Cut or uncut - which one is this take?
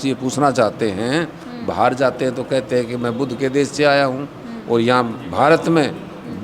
uncut